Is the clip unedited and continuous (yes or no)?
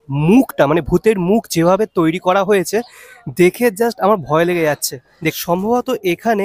no